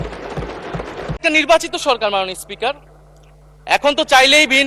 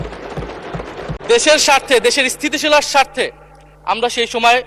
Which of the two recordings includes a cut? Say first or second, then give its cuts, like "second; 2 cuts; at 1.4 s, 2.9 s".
first; 1 cut; at 1.2 s